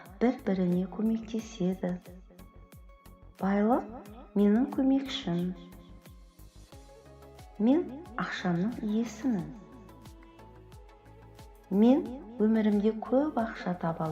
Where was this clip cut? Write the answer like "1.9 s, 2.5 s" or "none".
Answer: 5.9 s, 7.6 s

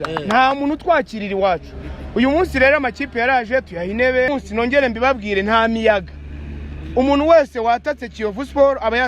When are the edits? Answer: 4.3 s

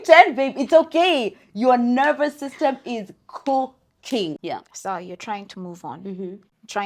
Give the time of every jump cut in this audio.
4.4 s

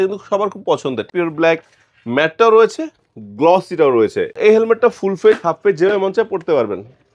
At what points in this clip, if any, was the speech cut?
1.1 s, 4.3 s

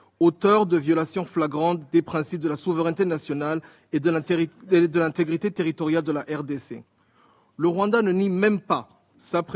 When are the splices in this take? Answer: none

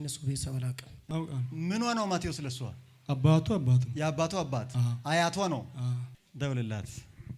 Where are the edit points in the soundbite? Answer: 1.1 s, 6.1 s

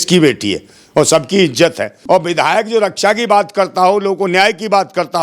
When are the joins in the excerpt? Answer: 1.9 s

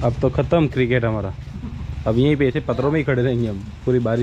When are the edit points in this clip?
none

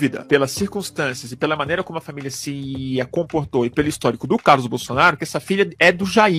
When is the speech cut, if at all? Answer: none

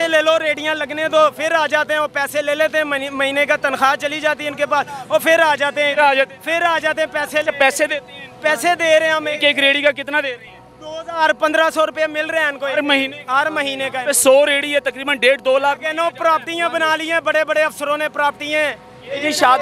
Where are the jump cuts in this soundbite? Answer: none

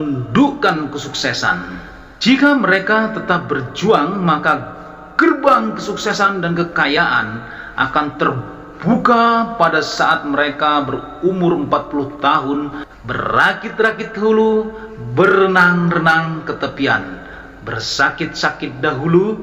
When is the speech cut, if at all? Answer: 12.8 s

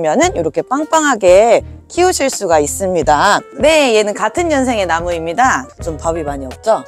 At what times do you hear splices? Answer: 3.5 s, 5.7 s

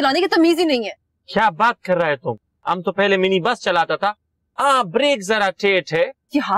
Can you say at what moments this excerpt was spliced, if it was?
none

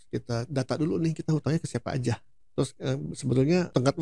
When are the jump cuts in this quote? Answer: 2.5 s

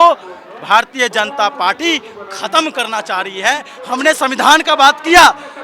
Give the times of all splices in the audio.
3.7 s

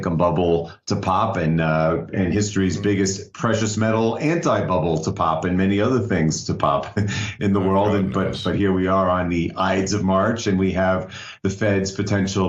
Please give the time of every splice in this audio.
6.7 s

